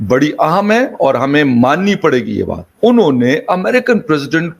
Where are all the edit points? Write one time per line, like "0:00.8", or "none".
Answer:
0:02.6